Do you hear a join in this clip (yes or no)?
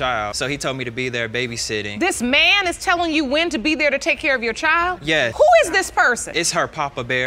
no